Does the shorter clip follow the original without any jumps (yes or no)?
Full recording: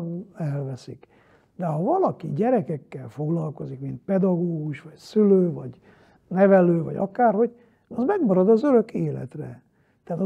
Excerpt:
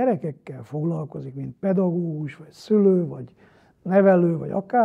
yes